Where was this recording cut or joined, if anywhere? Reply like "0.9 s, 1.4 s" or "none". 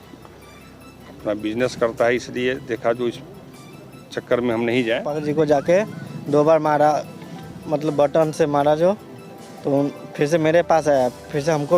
5.1 s